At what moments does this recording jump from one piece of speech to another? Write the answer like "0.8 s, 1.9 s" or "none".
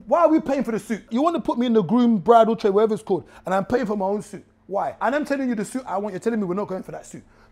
1.1 s, 5.0 s

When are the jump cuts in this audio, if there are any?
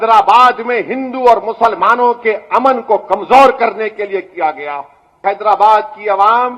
5.2 s

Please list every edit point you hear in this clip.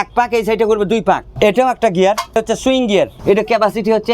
1.3 s, 2.8 s

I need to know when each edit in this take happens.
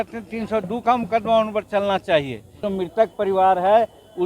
2.6 s

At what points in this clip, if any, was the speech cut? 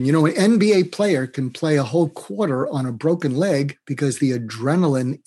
3.8 s

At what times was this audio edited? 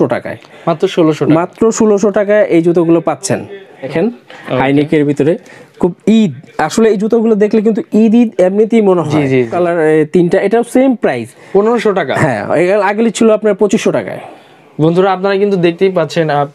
3.9 s, 9.5 s

